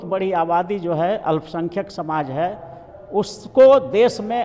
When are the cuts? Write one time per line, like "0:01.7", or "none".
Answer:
none